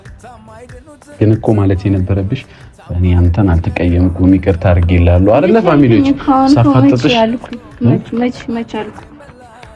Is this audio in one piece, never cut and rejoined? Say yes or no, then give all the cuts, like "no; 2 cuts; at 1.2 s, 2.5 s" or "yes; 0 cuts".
no; 1 cut; at 1.2 s